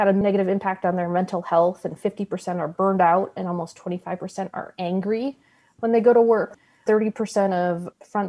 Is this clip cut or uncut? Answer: cut